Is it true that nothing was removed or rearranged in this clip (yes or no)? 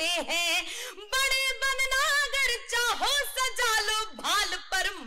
yes